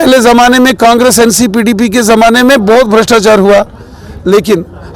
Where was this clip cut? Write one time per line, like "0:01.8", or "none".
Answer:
none